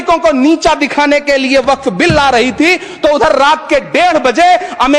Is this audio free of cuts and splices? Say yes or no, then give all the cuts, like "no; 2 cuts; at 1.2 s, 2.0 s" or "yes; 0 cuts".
yes; 0 cuts